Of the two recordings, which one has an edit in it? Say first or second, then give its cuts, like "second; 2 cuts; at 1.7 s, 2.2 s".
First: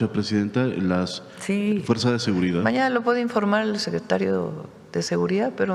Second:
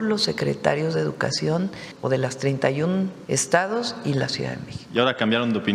second; 2 cuts; at 1.9 s, 3.2 s